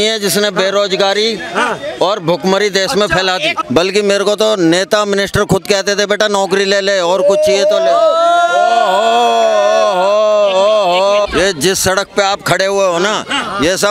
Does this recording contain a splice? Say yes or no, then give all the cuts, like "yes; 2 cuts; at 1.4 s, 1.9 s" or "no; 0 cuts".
yes; 2 cuts; at 3.6 s, 11.3 s